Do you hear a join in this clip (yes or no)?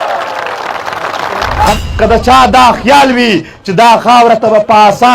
yes